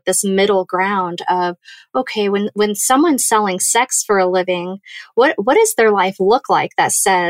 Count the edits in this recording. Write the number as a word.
zero